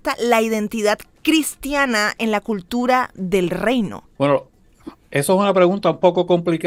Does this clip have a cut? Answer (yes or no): no